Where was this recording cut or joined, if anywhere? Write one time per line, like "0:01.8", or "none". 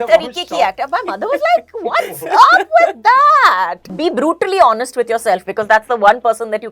0:03.9